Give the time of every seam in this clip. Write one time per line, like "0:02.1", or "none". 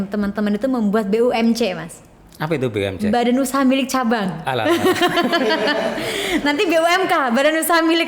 none